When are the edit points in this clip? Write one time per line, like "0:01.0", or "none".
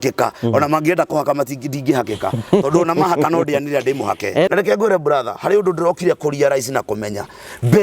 0:04.5